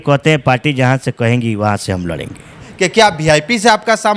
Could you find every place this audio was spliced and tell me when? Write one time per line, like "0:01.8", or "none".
0:02.7

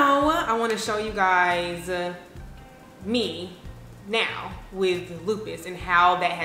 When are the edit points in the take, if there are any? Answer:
none

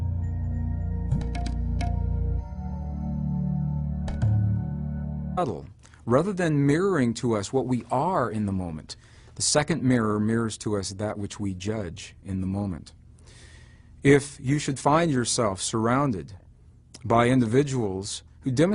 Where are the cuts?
none

